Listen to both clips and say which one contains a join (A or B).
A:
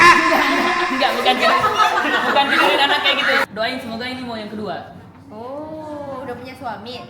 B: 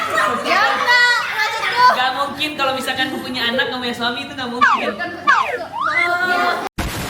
A